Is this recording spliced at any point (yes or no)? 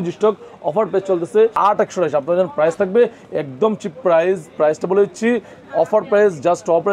yes